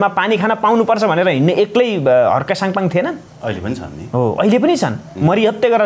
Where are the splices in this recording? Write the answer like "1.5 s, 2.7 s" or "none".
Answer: 3.3 s